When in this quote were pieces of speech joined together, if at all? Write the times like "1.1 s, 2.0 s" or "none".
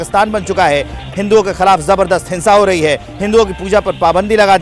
1.0 s